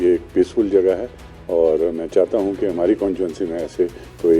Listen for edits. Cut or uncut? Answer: uncut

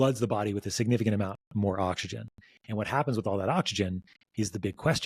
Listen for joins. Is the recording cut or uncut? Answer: uncut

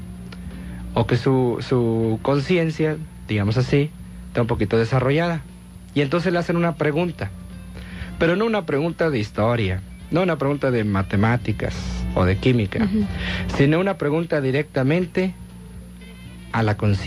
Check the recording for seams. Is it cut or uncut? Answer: cut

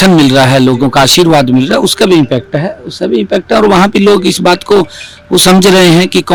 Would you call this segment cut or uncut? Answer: uncut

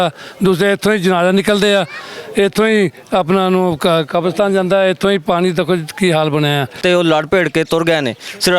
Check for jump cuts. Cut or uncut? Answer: cut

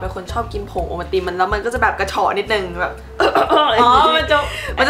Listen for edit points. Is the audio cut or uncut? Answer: uncut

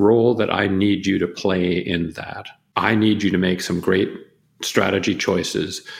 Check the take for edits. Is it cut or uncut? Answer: cut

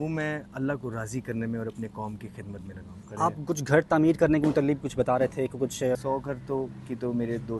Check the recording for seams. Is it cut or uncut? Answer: cut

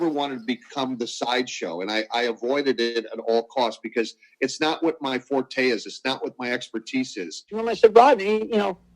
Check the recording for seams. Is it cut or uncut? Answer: cut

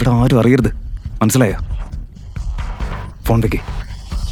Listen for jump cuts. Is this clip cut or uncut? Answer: uncut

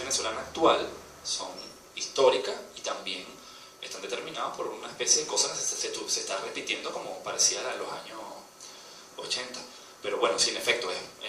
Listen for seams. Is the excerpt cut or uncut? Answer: cut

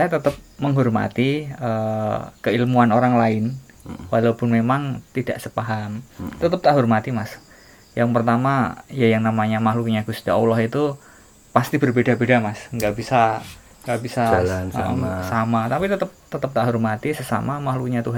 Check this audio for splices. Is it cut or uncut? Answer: uncut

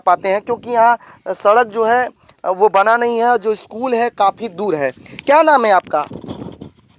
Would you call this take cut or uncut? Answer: uncut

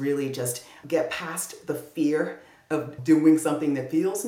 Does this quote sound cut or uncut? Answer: cut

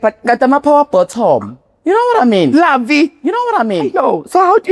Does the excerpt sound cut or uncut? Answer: uncut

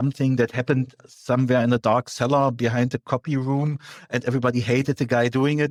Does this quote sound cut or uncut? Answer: uncut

